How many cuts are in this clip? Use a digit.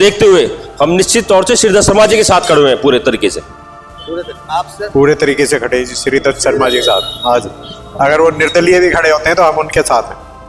0